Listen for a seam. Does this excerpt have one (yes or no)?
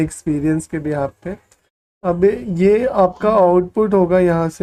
no